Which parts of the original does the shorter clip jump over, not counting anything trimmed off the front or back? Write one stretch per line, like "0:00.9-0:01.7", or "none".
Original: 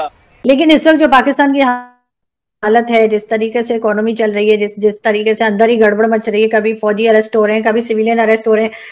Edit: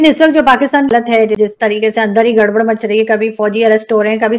0:02.0-0:04.7